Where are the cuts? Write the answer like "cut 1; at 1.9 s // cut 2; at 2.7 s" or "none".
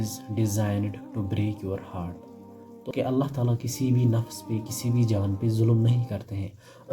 cut 1; at 2.7 s